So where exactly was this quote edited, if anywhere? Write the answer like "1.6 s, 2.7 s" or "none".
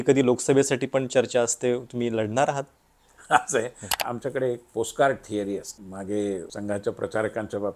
4.0 s, 5.8 s, 6.5 s